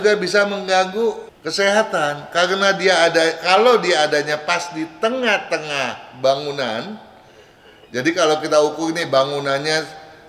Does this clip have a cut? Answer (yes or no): no